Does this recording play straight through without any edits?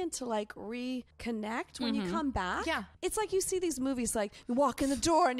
no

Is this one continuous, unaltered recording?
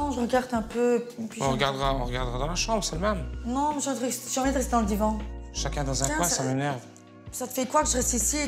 no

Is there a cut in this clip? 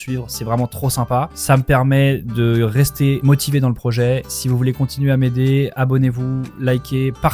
no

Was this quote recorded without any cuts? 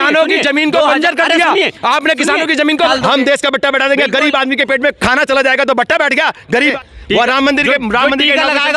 no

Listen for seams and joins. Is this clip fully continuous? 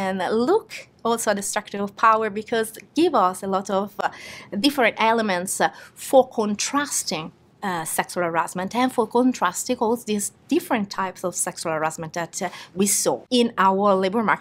no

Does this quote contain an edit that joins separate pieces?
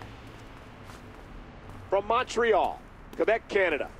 yes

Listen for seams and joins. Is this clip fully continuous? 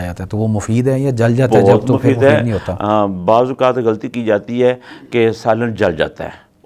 yes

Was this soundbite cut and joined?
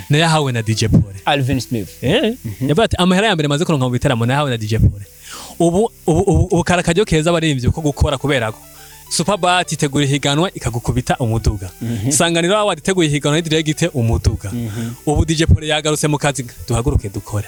no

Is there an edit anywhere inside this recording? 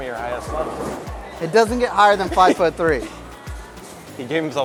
no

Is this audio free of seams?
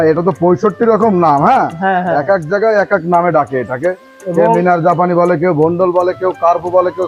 yes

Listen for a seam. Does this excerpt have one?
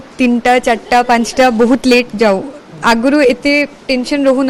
no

